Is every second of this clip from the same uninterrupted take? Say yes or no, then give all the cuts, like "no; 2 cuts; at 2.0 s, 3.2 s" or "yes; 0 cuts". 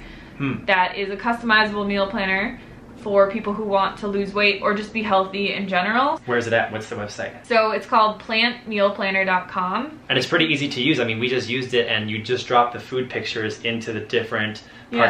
no; 2 cuts; at 6.2 s, 10.0 s